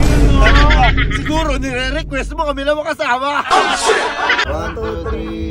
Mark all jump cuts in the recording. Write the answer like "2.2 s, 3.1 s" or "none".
4.4 s